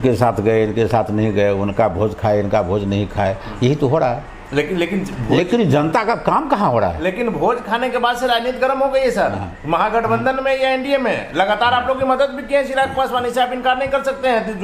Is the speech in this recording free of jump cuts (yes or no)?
yes